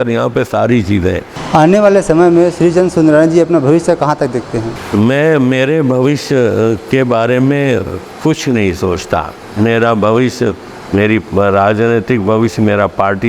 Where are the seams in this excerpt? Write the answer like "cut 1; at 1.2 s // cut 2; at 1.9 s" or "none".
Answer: cut 1; at 1.3 s // cut 2; at 4.8 s

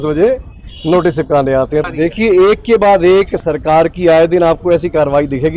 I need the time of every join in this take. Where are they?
cut 1; at 1.9 s

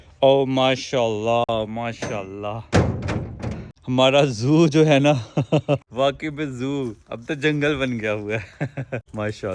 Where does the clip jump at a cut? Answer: none

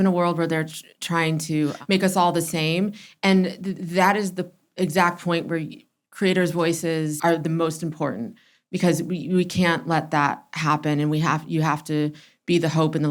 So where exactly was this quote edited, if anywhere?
cut 1; at 1.8 s // cut 2; at 7.2 s

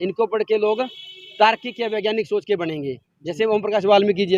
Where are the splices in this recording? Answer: none

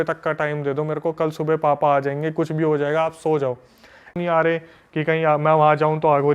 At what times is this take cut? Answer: cut 1; at 4.2 s

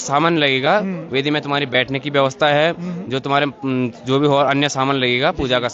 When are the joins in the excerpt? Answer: none

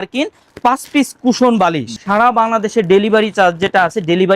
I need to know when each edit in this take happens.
cut 1; at 2.0 s

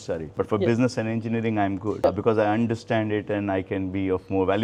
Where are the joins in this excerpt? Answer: none

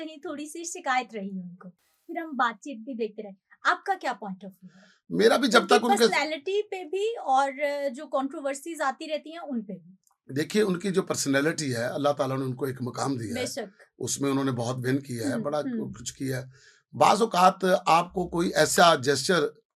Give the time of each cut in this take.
none

